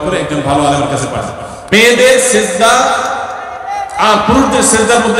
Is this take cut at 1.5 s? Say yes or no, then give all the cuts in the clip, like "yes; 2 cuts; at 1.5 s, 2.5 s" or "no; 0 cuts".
yes; 1 cut; at 1.5 s